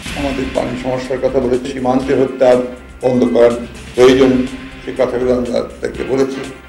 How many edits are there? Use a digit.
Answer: 1